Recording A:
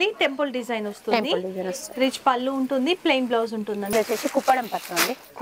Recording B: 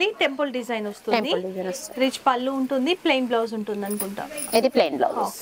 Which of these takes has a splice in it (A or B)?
A